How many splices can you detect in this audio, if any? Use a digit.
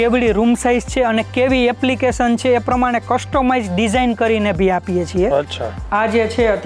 1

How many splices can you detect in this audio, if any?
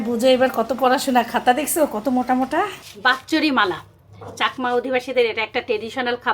1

